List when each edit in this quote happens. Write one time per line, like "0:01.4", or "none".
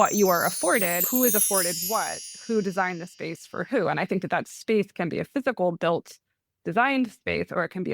0:01.1